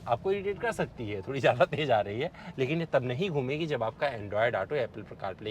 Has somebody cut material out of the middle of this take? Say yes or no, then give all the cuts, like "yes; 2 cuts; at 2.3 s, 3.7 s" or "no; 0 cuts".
yes; 1 cut; at 2.4 s